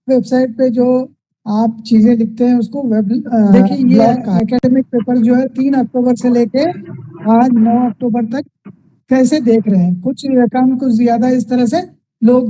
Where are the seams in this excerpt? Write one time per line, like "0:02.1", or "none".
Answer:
0:04.4

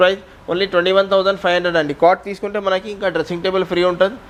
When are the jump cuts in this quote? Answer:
none

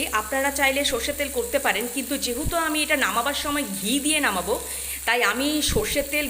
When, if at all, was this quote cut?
none

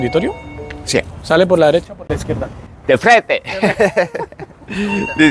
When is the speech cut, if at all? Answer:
none

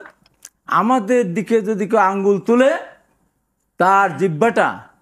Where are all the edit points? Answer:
none

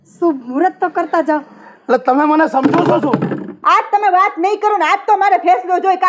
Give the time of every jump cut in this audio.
0:03.6

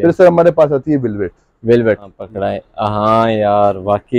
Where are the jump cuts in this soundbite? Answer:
0:02.2

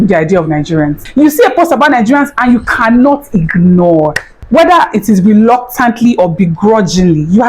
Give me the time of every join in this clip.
0:01.0
0:04.3

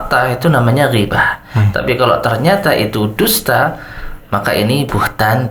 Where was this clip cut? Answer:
none

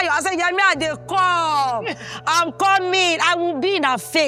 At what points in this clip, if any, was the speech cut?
none

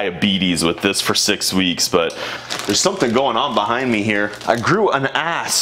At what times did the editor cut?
0:02.3
0:04.4

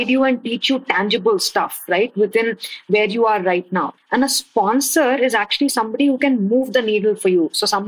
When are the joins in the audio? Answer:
0:03.9

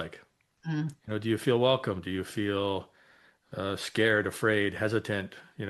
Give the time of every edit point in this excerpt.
none

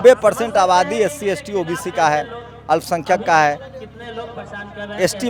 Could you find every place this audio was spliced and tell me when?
none

